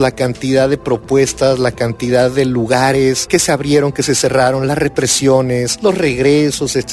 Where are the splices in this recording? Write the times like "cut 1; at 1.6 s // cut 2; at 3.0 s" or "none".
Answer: cut 1; at 3.2 s // cut 2; at 5.7 s